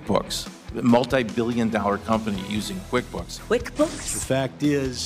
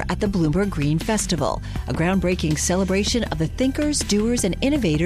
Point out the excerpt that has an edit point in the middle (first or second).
first